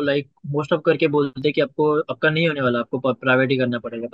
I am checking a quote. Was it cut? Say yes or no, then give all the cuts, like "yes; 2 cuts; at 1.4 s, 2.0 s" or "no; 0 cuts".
yes; 1 cut; at 1.3 s